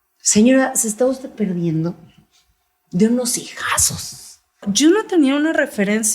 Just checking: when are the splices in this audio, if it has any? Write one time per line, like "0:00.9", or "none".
0:04.6